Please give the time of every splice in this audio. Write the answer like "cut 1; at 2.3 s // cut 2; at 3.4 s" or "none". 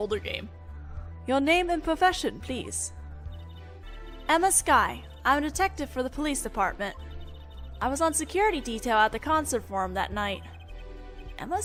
none